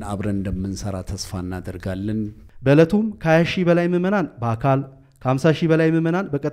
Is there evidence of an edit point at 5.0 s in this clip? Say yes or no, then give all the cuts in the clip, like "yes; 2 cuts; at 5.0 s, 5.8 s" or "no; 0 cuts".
no; 1 cut; at 2.4 s